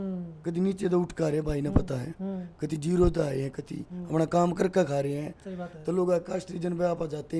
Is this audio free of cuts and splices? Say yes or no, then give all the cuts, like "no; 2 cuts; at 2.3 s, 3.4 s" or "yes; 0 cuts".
yes; 0 cuts